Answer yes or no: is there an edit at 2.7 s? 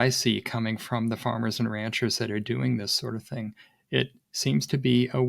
no